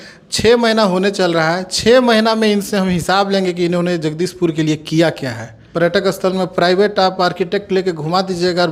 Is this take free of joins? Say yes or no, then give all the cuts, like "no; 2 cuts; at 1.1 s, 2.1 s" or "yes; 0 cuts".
yes; 0 cuts